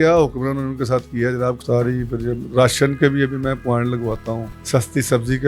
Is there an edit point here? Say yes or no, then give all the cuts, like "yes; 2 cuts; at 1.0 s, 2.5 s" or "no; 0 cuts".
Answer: yes; 2 cuts; at 1.6 s, 4.5 s